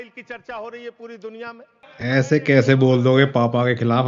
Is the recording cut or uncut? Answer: cut